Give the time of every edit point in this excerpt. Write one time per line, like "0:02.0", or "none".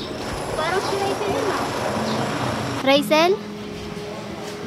none